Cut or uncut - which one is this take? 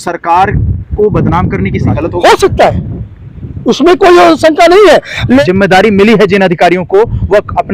cut